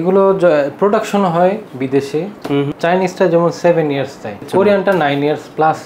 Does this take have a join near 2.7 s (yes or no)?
yes